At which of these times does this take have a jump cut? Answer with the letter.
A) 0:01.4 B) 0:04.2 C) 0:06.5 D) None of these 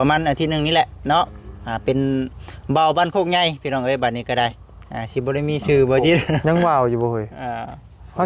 D